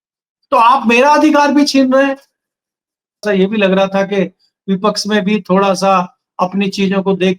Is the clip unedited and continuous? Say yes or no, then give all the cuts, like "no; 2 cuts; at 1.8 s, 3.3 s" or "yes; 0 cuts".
no; 1 cut; at 3.2 s